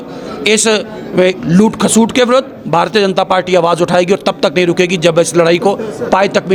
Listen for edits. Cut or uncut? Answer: uncut